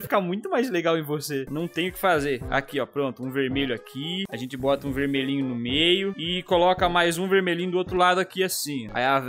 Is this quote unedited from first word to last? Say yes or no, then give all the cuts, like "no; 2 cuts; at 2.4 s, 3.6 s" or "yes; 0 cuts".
no; 1 cut; at 1.4 s